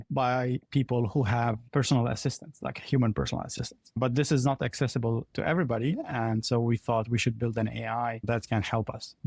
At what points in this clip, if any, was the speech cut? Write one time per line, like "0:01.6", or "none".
none